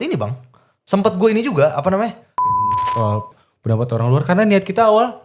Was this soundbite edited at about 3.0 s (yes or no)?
yes